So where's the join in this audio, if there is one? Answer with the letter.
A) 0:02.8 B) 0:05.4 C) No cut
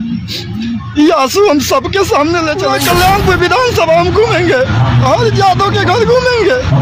A